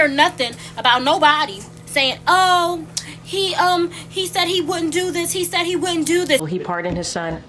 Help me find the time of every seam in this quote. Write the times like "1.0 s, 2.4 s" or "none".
none